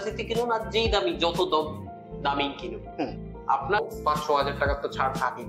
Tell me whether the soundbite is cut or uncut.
cut